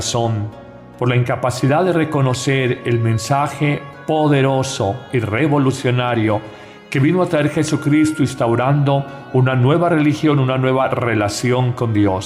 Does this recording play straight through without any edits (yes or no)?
no